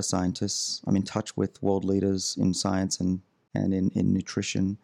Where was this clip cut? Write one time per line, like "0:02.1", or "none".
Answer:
0:03.4